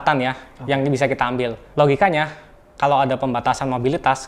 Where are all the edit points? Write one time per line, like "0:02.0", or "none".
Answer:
0:01.6